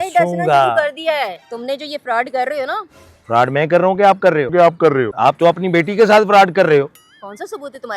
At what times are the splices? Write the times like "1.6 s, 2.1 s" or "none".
1.5 s, 4.8 s